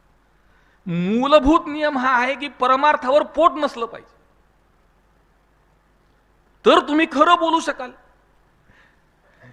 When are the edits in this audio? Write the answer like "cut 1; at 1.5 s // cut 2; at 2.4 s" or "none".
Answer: cut 1; at 8.5 s